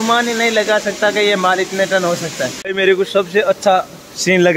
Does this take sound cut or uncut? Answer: uncut